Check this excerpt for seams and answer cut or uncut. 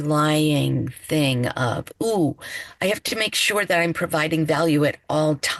uncut